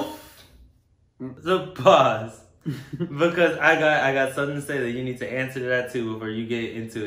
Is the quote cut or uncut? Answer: uncut